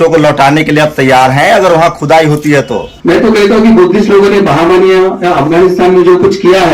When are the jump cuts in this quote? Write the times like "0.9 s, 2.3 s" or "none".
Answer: 2.9 s